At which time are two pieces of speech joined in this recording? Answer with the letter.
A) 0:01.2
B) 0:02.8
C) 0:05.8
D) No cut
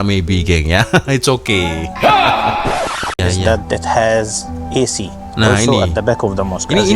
B